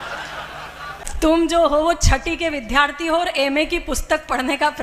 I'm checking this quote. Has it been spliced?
yes; 1 cut; at 1.1 s

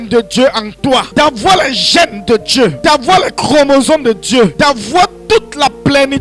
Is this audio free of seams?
no; 3 cuts; at 1.1 s, 2.8 s, 4.5 s

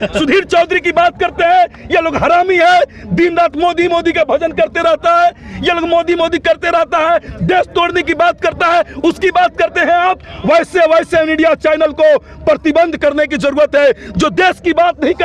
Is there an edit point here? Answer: no; 0 cuts

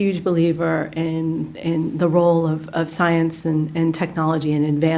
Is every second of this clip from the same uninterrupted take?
yes; 0 cuts

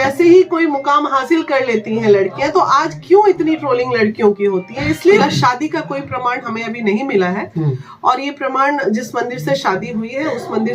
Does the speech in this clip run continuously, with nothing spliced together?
no; 1 cut; at 5.2 s

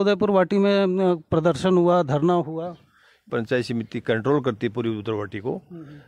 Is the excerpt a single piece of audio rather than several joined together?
no; 1 cut; at 3.2 s

